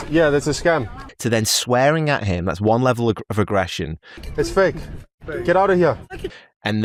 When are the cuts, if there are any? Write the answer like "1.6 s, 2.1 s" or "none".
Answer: none